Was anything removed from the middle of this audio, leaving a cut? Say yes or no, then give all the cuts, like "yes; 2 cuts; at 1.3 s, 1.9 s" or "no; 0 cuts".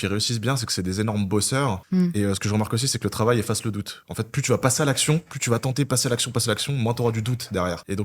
no; 0 cuts